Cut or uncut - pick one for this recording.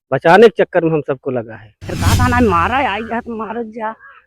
cut